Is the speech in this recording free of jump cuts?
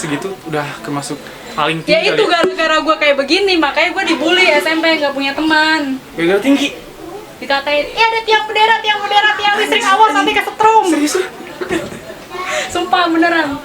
yes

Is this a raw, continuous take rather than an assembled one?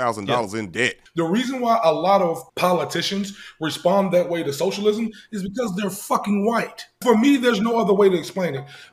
no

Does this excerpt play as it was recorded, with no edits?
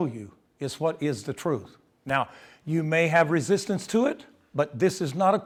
yes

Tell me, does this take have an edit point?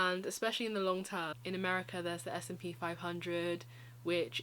yes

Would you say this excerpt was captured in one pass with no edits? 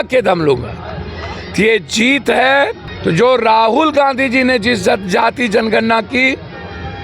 no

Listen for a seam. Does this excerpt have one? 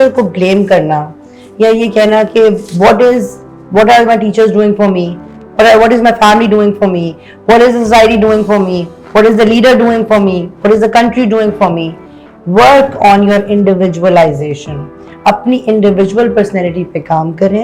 no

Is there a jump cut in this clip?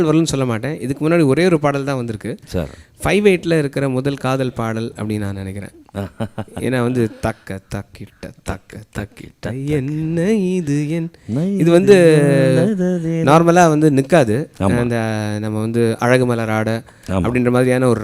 no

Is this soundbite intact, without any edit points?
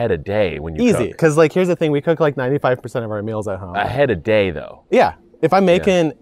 no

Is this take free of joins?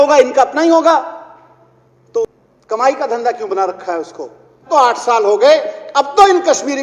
no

